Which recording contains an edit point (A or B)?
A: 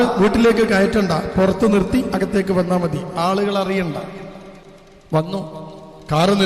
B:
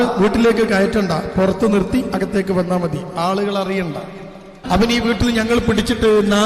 B